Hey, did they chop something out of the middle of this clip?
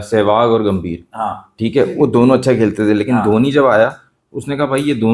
no; 0 cuts

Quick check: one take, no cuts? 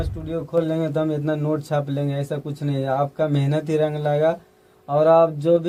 yes; 0 cuts

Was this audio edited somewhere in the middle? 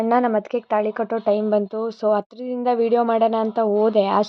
no; 0 cuts

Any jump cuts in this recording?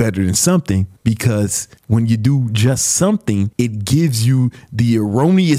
yes; 3 cuts; at 0.9 s, 1.7 s, 3.5 s

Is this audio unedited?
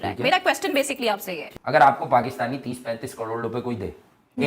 no; 1 cut; at 1.7 s

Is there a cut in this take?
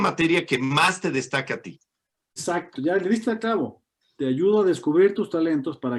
yes; 1 cut; at 2.4 s

